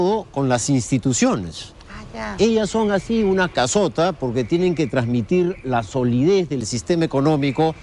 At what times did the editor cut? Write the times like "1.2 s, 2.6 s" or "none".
none